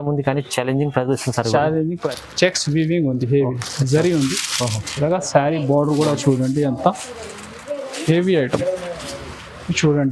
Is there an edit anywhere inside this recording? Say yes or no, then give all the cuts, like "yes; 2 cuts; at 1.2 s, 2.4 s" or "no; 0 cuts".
yes; 1 cut; at 2.0 s